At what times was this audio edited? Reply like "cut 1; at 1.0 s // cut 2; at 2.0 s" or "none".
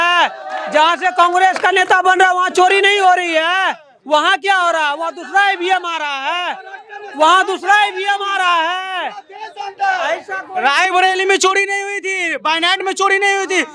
none